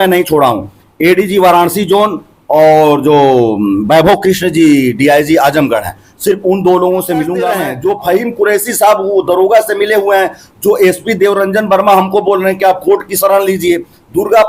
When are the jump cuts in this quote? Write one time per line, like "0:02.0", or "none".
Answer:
0:07.7